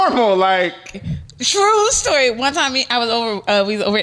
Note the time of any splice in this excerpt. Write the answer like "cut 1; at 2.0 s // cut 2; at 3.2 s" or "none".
cut 1; at 1.1 s